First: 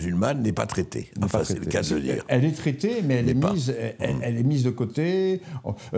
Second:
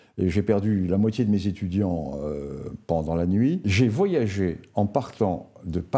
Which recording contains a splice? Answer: second; 1 cut; at 3.6 s

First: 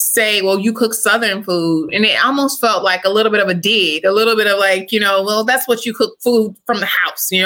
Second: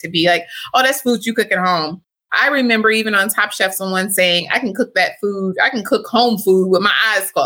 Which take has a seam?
first; 1 cut; at 1.9 s

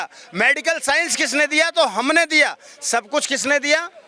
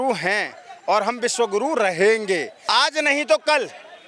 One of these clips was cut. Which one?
second; 1 cut; at 2.5 s

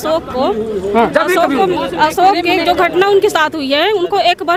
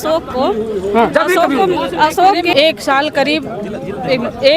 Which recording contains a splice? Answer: second; 1 cut; at 2.5 s

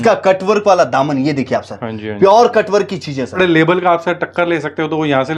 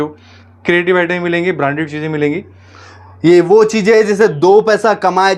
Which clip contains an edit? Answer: first; 1 cut; at 3.4 s

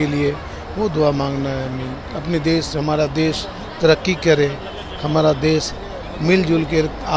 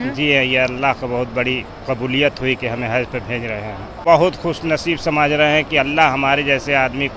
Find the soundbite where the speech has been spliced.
second; 1 cut; at 4.0 s

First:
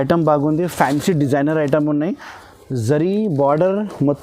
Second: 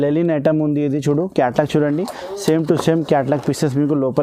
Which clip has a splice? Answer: first; 1 cut; at 2.4 s

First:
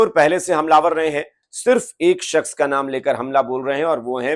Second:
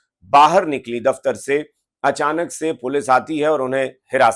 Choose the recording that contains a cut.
first; 1 cut; at 1.4 s

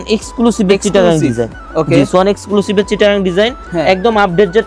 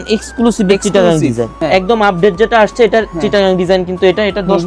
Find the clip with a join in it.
second; 1 cut; at 1.5 s

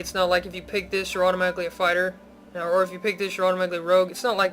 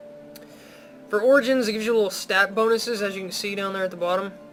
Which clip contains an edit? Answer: first; 1 cut; at 1.5 s

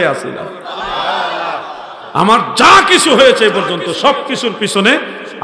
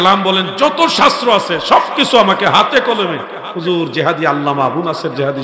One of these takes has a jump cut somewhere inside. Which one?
first; 1 cut; at 2.0 s

